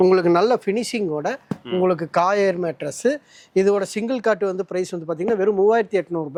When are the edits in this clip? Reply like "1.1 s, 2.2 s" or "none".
none